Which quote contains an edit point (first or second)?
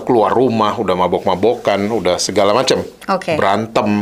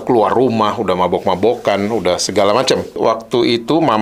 second